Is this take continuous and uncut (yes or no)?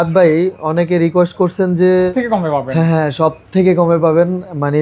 no